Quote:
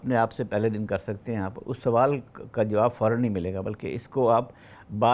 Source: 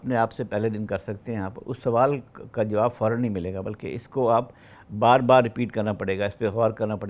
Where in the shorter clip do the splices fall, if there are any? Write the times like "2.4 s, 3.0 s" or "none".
none